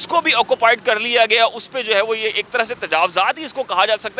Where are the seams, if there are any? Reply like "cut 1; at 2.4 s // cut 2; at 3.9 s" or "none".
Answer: none